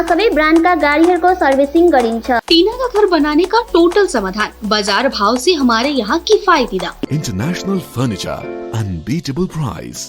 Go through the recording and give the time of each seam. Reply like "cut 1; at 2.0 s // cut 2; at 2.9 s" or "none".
cut 1; at 2.4 s // cut 2; at 7.1 s